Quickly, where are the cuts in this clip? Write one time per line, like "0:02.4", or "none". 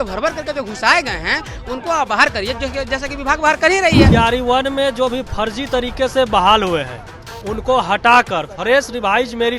0:04.1